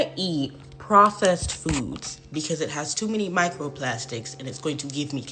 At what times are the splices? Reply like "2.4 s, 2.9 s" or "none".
none